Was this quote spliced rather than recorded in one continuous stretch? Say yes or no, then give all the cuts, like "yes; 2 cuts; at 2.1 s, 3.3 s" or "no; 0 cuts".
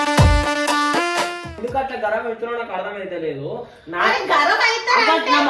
yes; 1 cut; at 1.6 s